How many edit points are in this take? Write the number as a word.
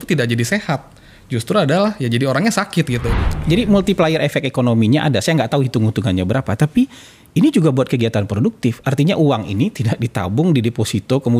one